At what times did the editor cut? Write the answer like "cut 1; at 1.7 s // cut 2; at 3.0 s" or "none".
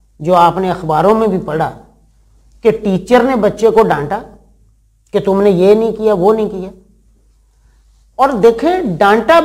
none